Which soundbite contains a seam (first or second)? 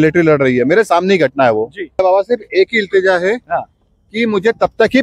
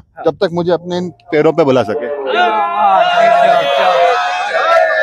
first